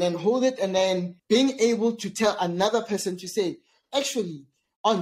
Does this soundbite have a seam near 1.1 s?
yes; 1 cut; at 1.1 s

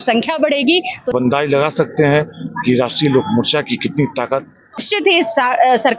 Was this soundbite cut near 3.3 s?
no; 2 cuts; at 1.1 s, 4.8 s

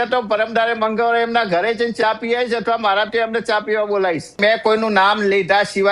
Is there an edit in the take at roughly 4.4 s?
yes; 1 cut; at 4.4 s

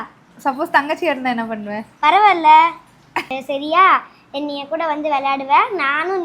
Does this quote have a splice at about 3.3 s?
yes; 1 cut; at 3.3 s

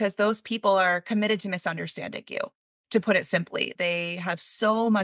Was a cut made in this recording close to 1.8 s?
no; 1 cut; at 3.7 s

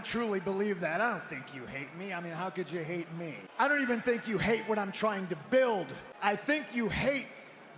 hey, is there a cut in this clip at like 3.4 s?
yes; 2 cuts; at 3.4 s, 6.0 s

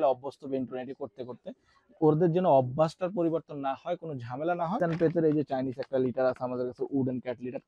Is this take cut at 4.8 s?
yes; 1 cut; at 4.8 s

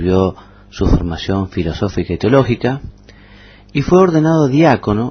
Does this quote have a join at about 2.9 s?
no; 0 cuts

